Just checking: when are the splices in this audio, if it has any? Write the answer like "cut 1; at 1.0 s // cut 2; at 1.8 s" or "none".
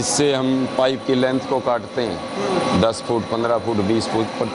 none